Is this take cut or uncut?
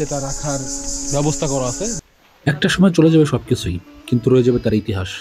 cut